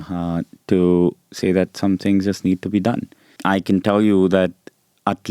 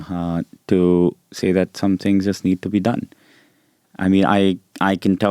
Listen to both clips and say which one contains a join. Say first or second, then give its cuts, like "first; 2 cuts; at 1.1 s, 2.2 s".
first; 1 cut; at 3.3 s